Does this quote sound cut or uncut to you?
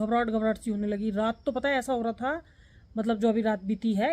uncut